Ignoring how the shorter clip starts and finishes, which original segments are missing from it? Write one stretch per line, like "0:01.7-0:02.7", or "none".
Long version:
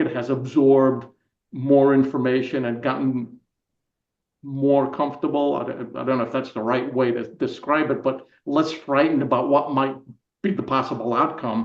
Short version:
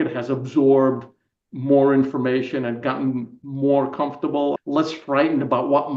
0:03.4-0:04.4
0:05.6-0:08.4